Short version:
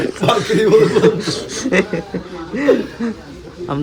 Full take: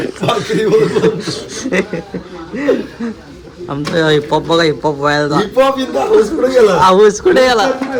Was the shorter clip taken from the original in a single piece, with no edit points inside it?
yes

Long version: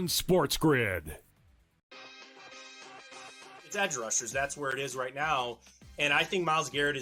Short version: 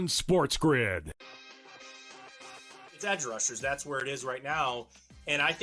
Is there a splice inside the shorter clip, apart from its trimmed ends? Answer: yes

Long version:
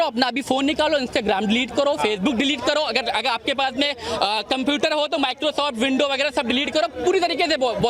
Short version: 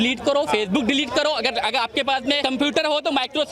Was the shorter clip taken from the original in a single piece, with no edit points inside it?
no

